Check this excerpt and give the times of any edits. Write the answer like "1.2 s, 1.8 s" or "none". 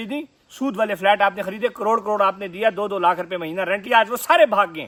none